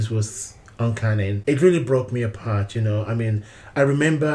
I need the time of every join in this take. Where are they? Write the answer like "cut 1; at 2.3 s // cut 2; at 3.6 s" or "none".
cut 1; at 1.4 s